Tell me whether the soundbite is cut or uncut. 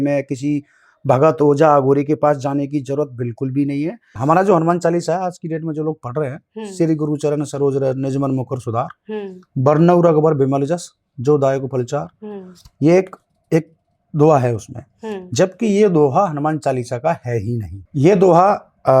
cut